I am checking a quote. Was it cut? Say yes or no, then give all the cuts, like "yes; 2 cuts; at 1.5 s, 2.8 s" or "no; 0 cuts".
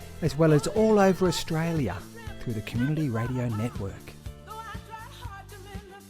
yes; 1 cut; at 3.9 s